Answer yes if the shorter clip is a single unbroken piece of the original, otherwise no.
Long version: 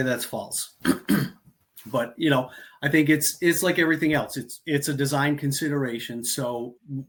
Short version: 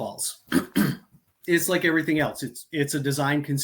no